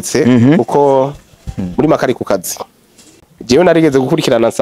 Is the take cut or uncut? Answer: cut